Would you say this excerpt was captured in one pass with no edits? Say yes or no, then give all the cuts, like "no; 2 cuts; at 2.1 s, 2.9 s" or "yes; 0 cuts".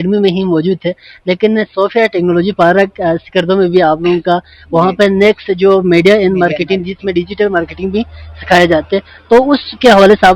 yes; 0 cuts